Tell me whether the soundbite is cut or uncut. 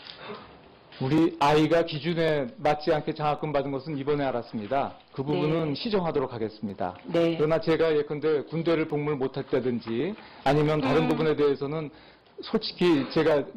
uncut